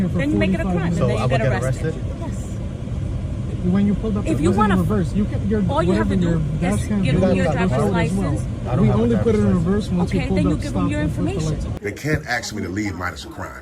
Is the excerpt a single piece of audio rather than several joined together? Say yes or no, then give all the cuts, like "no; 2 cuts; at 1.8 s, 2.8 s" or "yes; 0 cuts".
no; 1 cut; at 11.7 s